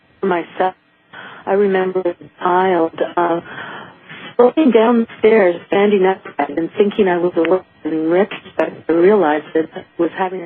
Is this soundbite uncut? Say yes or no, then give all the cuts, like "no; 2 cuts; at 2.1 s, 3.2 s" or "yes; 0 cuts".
yes; 0 cuts